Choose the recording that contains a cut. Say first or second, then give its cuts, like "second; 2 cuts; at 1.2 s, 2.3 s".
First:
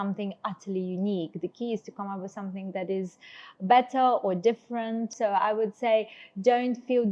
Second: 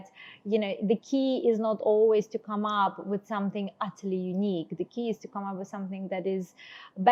first; 1 cut; at 5.1 s